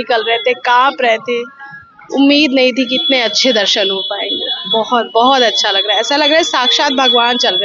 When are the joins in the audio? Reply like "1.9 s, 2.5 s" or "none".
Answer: none